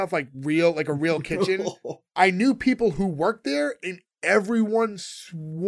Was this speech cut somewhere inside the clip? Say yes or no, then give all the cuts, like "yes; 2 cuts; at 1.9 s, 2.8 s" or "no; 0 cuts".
yes; 1 cut; at 2.0 s